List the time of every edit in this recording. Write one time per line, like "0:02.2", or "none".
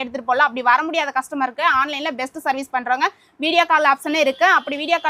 none